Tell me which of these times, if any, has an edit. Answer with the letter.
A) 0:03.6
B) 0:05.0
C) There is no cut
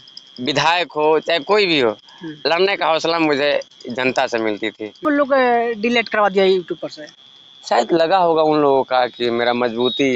B